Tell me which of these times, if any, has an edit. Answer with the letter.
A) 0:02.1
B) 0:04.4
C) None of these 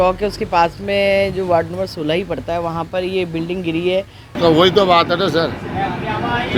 B